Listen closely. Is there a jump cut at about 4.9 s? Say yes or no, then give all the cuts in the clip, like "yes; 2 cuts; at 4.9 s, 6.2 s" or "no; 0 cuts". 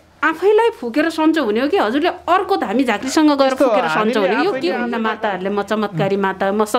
yes; 1 cut; at 4.9 s